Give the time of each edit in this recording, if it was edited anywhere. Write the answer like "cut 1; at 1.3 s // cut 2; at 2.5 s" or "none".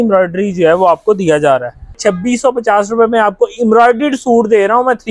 cut 1; at 2.0 s